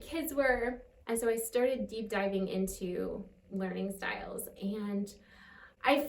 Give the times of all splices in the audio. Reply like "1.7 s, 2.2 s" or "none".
0.9 s